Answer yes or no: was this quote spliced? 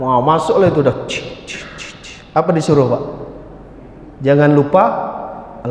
no